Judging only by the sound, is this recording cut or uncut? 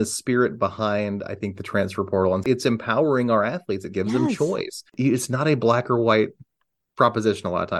cut